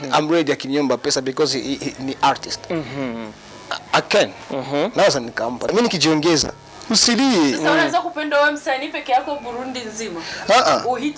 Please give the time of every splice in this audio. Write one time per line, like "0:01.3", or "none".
0:05.7

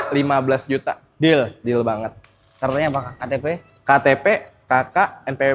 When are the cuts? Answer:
none

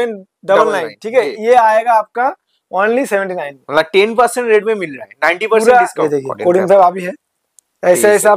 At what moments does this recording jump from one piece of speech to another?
0:05.9

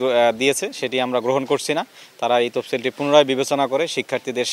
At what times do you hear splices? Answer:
none

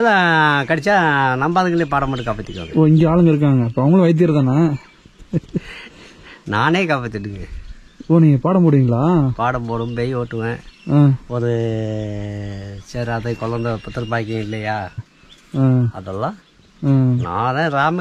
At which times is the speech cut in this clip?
none

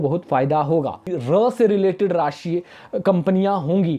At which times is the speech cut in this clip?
0:01.1

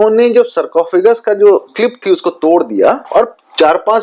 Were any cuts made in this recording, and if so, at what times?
0:01.7
0:03.0

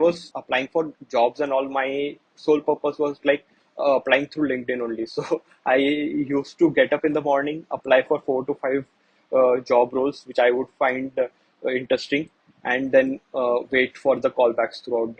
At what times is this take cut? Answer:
none

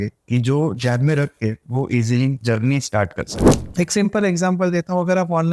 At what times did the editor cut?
0:03.4

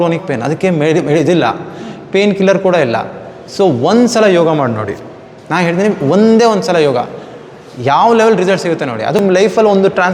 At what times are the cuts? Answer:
0:09.2

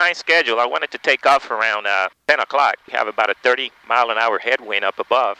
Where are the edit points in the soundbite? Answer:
0:02.1
0:02.8

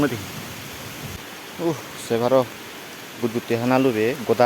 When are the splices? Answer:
0:01.1

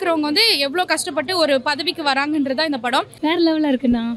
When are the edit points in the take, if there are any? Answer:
0:03.1

